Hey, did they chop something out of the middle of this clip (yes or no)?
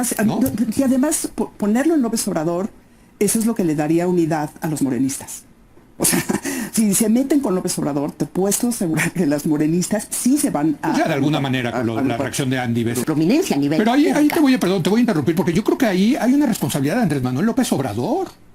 yes